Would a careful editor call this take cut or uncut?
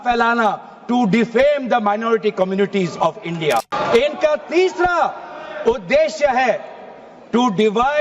cut